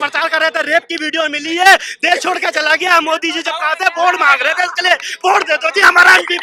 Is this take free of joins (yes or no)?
yes